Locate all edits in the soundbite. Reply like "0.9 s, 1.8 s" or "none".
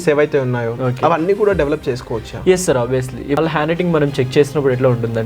3.4 s